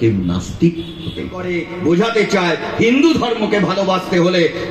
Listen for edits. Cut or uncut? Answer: cut